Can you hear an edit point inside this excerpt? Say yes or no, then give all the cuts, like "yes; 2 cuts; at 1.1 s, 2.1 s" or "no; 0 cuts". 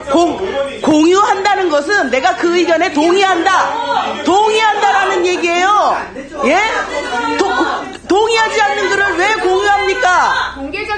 no; 0 cuts